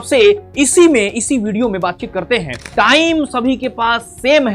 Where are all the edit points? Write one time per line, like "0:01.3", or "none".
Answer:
0:02.6